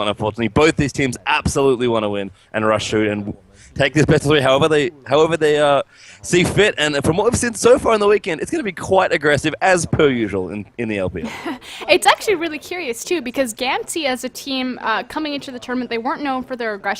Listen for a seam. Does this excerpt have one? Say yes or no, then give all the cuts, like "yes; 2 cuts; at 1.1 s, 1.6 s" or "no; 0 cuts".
yes; 1 cut; at 3.4 s